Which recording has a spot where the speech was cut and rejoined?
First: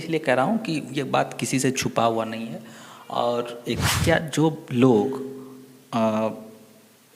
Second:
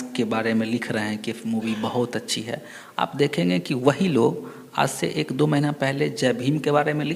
first; 1 cut; at 3.8 s

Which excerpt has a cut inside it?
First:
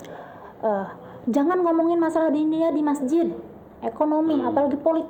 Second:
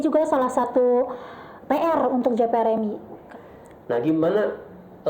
second; 1 cut; at 3.2 s

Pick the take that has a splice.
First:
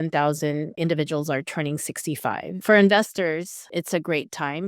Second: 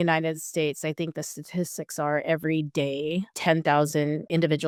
first; 2 cuts; at 2.5 s, 3.6 s

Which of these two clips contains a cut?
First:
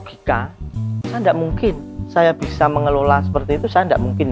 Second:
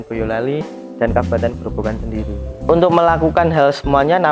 second; 1 cut; at 2.6 s

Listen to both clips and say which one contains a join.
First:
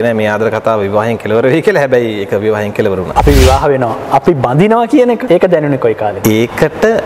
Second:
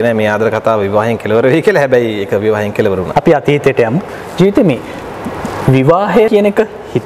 first; 2 cuts; at 3.1 s, 5.2 s

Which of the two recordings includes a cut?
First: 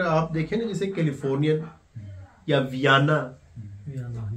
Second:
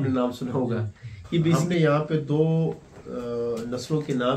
second; 1 cut; at 1.6 s

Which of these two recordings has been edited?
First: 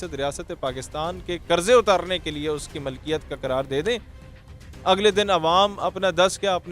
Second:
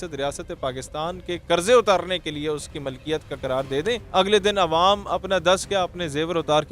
second; 1 cut; at 4.0 s

